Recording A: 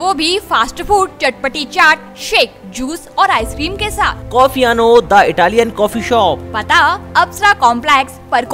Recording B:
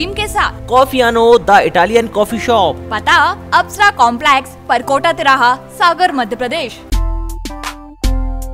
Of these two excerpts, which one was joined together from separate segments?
B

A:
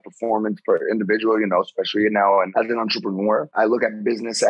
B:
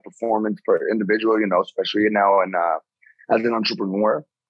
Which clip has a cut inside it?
A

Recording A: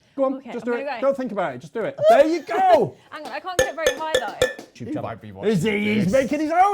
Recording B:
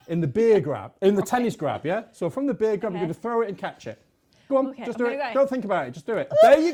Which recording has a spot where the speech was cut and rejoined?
A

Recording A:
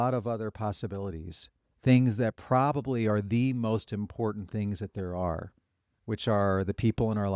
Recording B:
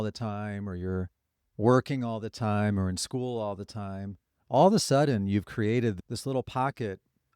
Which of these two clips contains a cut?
B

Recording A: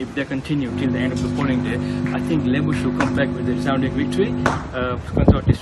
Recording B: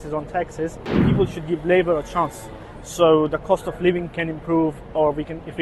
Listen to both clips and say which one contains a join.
B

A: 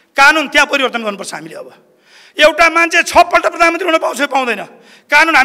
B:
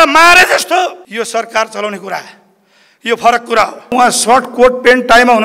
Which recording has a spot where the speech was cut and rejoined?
B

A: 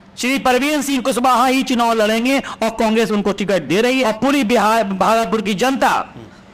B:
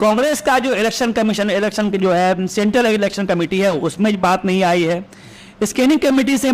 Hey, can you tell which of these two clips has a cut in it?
A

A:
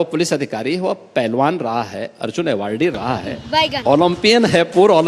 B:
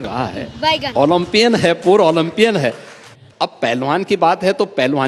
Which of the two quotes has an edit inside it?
B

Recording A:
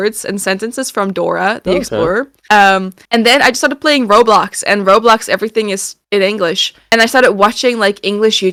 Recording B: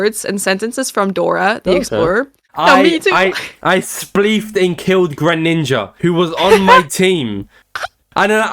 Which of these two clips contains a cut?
B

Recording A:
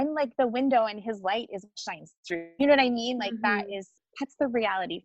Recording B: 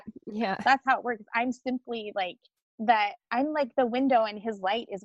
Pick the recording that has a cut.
A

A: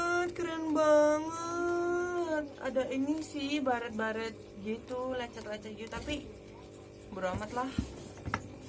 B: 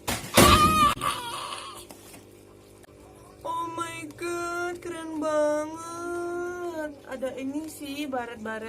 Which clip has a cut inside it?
B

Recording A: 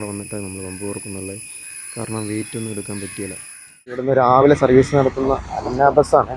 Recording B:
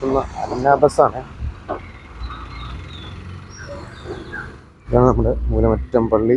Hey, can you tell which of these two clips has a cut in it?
A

